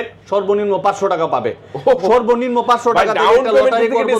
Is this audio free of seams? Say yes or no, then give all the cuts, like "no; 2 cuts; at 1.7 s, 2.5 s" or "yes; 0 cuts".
yes; 0 cuts